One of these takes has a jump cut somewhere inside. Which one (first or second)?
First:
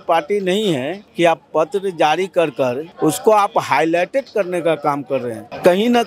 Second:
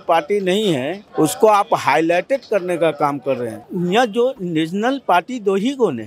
second